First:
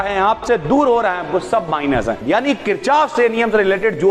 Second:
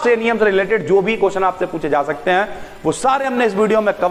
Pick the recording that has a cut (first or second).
first